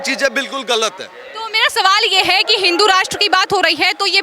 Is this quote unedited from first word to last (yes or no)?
yes